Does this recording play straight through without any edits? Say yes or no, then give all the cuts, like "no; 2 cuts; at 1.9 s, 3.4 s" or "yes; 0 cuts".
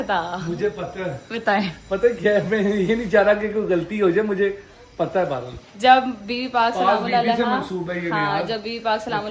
yes; 0 cuts